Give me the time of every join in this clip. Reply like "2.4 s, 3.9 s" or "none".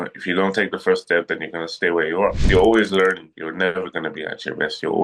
2.4 s